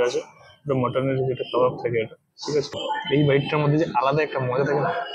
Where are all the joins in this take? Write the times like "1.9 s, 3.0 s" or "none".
2.8 s